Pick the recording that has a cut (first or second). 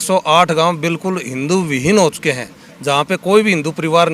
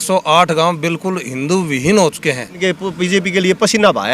second